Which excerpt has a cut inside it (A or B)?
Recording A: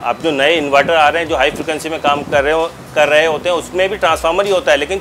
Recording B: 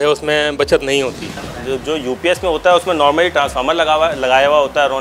B